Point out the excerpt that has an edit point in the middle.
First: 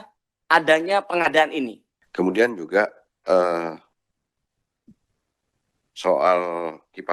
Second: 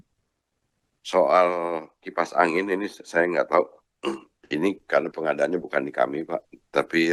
first; 1 cut; at 2.0 s

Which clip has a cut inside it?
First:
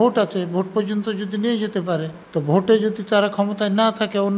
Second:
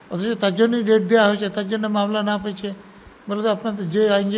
first; 1 cut; at 2.2 s

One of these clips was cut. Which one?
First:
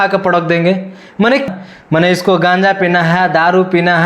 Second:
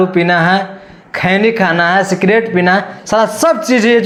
first; 1 cut; at 1.5 s

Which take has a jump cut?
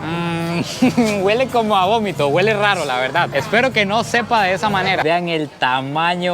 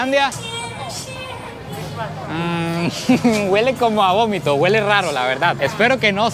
first; 1 cut; at 5.0 s

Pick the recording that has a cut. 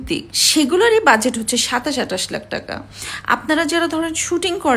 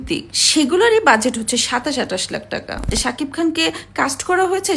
second; 1 cut; at 3.0 s

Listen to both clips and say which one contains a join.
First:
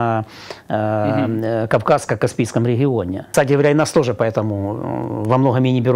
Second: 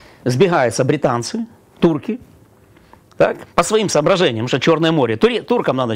first; 1 cut; at 3.3 s

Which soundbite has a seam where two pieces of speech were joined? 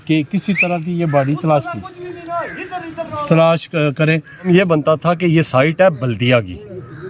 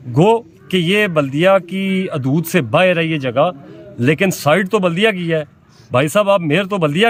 first; 1 cut; at 4.5 s

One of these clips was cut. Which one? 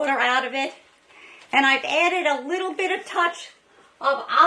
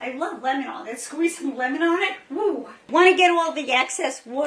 second; 1 cut; at 2.8 s

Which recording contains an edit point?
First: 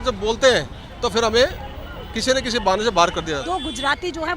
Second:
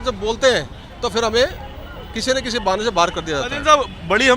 first; 1 cut; at 3.4 s

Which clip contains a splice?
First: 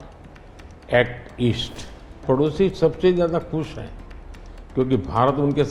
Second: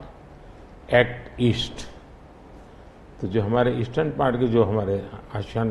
first; 1 cut; at 2.2 s

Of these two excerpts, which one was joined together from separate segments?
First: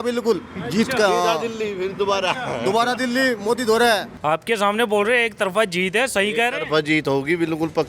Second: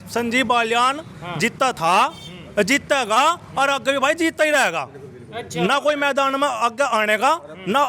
first; 1 cut; at 4.1 s

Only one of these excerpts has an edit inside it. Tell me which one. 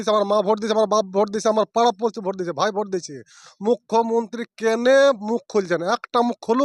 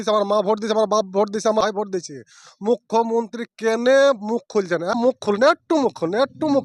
second; 2 cuts; at 1.6 s, 5.0 s

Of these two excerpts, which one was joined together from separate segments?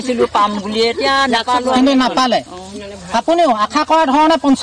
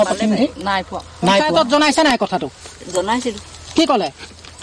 second; 1 cut; at 1.5 s

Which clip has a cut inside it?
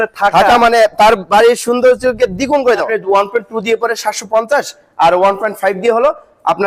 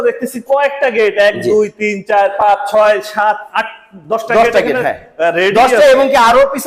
first; 1 cut; at 2.9 s

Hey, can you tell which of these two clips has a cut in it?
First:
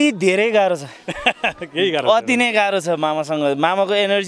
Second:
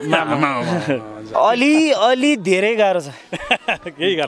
second; 1 cut; at 1.3 s

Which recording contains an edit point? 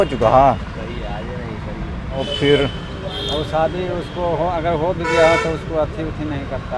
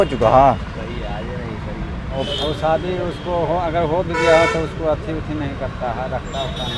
second; 1 cut; at 2.3 s

